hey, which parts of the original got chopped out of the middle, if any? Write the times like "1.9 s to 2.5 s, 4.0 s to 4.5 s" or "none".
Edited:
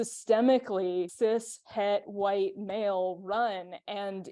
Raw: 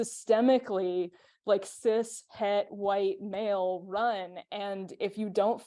1.1 s to 1.8 s